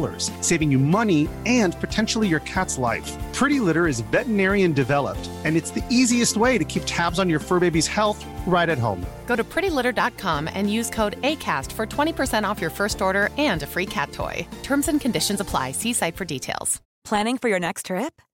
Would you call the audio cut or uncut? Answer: uncut